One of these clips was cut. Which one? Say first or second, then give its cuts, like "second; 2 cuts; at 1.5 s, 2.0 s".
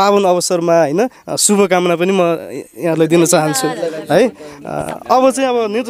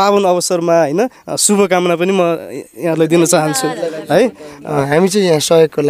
second; 1 cut; at 4.7 s